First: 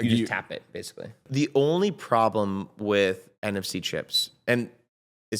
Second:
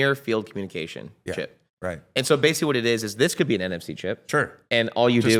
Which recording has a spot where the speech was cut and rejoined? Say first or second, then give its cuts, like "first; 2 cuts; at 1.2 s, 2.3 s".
first; 1 cut; at 1.2 s